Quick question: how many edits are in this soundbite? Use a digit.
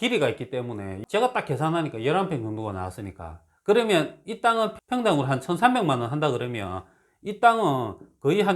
2